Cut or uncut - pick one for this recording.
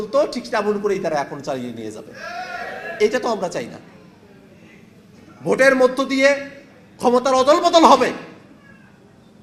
uncut